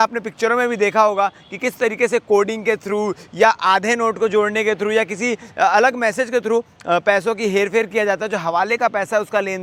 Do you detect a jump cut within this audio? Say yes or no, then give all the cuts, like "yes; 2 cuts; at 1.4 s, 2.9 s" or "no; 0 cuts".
no; 0 cuts